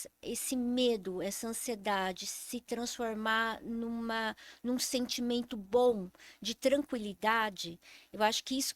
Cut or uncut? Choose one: uncut